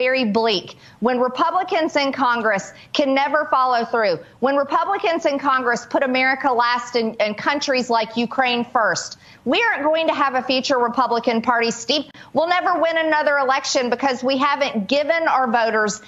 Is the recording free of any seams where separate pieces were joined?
yes; 0 cuts

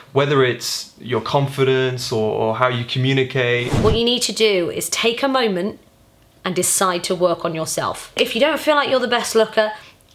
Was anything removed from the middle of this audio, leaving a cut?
yes; 2 cuts; at 3.7 s, 8.1 s

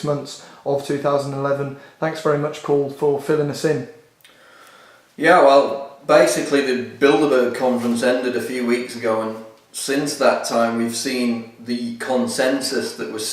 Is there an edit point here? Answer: yes; 1 cut; at 3.1 s

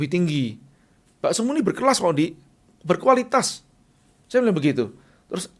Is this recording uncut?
yes; 0 cuts

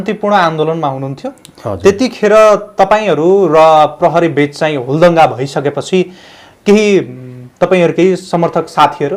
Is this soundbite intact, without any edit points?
yes; 0 cuts

